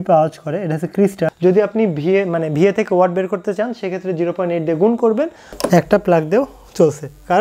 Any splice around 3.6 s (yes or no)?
no